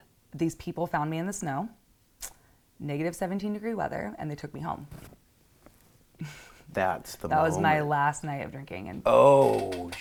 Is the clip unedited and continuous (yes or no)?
yes